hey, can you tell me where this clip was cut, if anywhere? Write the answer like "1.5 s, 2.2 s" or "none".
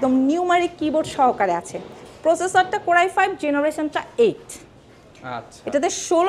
none